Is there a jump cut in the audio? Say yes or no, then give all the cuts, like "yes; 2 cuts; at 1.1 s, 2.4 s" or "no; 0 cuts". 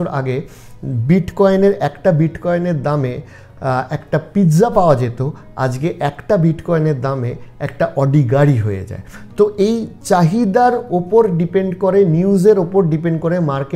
no; 0 cuts